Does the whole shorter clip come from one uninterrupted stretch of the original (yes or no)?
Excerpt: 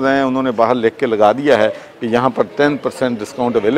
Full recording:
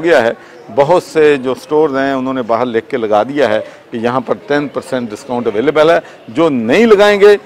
yes